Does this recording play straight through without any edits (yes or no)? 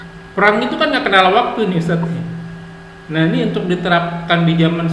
yes